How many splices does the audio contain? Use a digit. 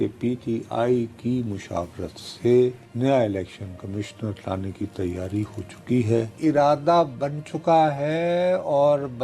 2